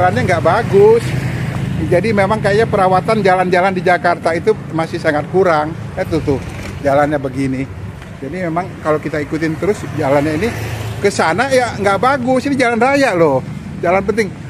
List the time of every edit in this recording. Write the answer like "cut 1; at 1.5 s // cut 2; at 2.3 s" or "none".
none